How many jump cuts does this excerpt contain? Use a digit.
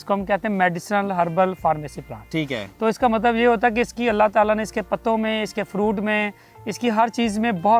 0